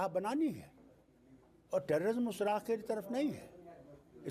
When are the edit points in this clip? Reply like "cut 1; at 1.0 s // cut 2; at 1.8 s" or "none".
none